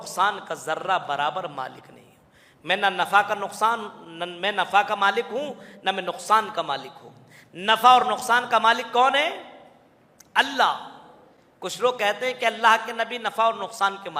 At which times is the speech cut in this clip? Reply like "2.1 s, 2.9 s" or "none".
none